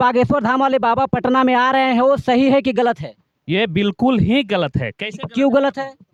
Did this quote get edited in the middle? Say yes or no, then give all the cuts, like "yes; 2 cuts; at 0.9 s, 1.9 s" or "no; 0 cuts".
no; 0 cuts